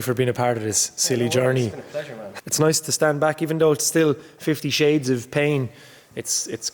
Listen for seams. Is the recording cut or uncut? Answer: cut